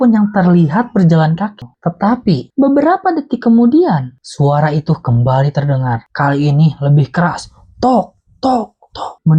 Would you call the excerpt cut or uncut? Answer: cut